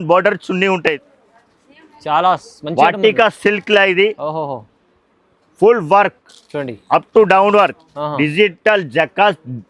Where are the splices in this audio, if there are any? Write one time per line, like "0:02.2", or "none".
0:01.1